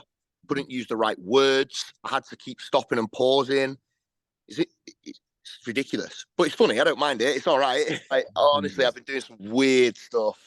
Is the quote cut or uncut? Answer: cut